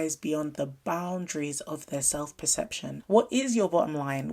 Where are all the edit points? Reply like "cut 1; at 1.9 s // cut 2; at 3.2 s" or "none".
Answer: cut 1; at 2.9 s